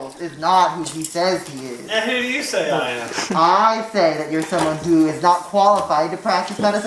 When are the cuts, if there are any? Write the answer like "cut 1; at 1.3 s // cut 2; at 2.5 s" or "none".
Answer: none